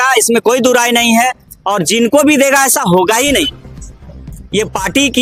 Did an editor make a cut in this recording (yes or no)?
no